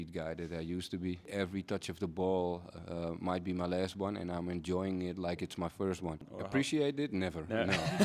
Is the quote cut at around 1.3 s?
yes; 2 cuts; at 1.3 s, 6.3 s

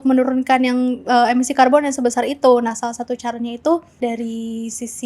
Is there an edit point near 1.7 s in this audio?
no; 1 cut; at 3.9 s

